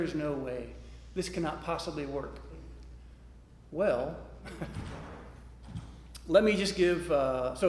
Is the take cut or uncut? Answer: uncut